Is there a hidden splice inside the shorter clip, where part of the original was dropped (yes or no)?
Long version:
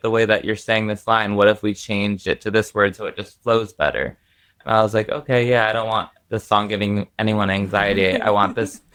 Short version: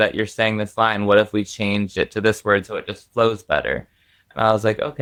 no